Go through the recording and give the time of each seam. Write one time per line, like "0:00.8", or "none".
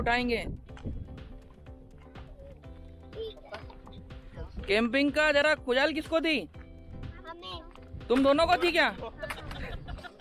none